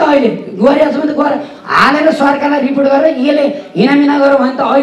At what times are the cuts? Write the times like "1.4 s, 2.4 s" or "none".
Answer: none